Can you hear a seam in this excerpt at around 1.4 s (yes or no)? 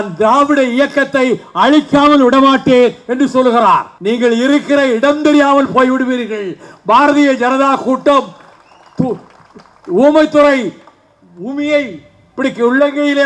no